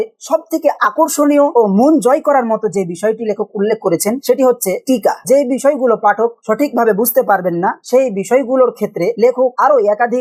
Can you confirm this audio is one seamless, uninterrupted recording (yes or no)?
yes